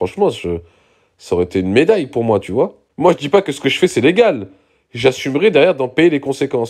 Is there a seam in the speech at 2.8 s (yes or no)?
yes